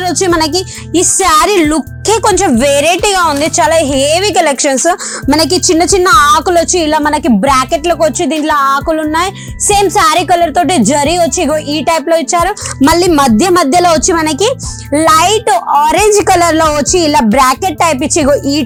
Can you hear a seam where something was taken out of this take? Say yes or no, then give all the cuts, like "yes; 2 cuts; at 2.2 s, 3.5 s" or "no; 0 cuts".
no; 0 cuts